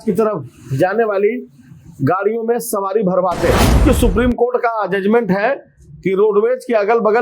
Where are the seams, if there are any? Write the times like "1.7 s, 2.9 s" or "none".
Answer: 3.8 s